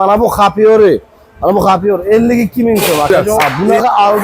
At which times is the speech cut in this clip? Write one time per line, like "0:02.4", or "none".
0:03.2

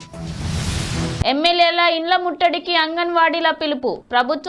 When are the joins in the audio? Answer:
0:01.2

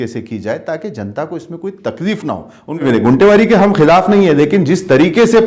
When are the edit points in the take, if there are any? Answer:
0:02.8

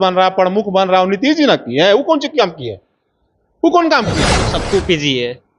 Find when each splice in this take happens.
0:04.5

